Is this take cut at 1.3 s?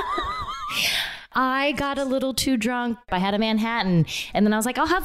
yes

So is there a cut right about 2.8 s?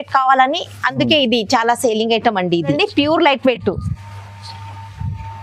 yes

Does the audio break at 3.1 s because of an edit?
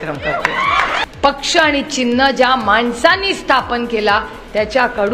no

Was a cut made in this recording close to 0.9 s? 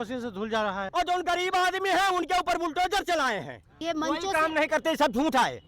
yes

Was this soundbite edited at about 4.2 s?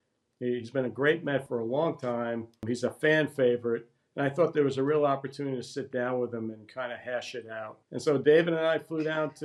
no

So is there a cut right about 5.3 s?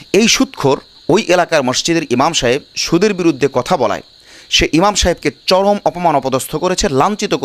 no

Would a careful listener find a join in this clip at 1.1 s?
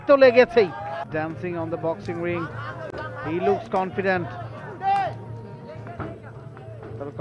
yes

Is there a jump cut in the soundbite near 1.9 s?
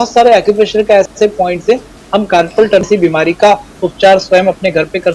yes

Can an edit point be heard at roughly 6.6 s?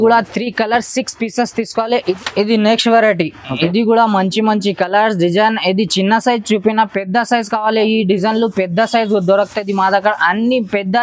no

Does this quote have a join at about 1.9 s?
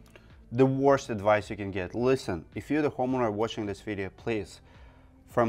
no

